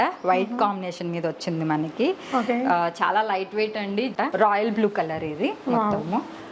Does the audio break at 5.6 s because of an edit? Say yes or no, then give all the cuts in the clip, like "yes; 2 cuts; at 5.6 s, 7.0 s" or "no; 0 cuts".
no; 1 cut; at 4.1 s